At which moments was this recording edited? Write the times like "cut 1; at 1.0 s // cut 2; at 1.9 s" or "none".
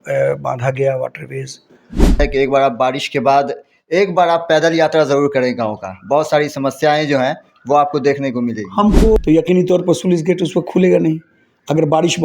cut 1; at 2.2 s // cut 2; at 9.2 s